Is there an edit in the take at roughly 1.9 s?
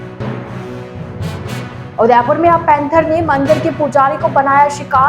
yes; 1 cut; at 1.9 s

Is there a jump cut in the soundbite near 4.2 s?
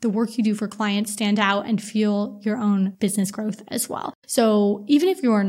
yes; 2 cuts; at 2.9 s, 4.2 s

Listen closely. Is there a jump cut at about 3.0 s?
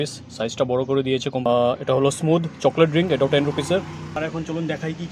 no; 2 cuts; at 1.5 s, 4.2 s

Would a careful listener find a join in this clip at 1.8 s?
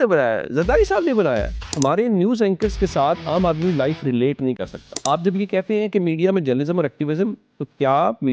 yes; 2 cuts; at 1.8 s, 5.0 s

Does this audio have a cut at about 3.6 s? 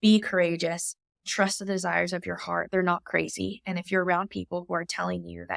no; 1 cut; at 1.2 s

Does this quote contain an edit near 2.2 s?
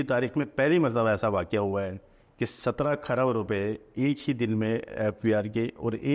no; 0 cuts

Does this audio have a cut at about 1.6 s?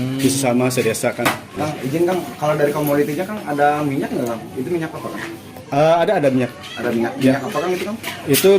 yes; 1 cut; at 1.6 s

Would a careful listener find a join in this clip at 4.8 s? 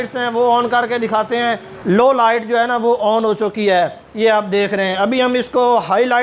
no; 1 cut; at 1.8 s

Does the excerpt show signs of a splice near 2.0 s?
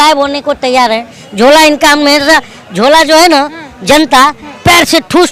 no; 0 cuts

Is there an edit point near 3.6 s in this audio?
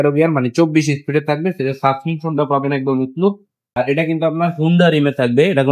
yes; 1 cut; at 3.6 s

